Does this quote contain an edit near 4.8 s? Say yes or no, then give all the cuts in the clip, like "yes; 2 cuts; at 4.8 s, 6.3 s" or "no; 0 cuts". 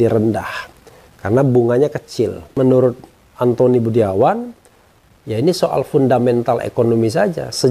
no; 1 cut; at 2.5 s